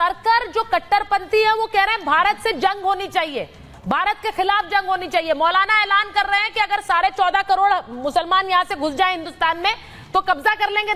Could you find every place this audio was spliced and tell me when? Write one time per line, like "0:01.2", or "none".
none